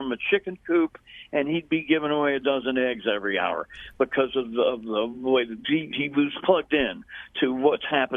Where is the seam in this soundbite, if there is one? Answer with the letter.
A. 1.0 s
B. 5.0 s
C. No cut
C